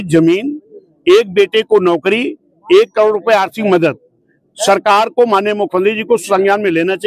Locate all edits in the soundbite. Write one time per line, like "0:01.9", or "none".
none